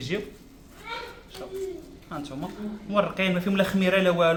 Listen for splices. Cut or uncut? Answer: uncut